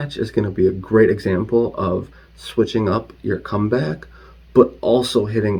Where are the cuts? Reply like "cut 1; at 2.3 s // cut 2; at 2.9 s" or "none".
none